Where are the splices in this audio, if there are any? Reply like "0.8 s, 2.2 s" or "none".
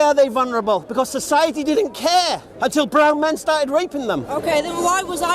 none